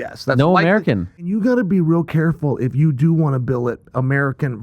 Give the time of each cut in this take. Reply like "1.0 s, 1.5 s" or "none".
1.3 s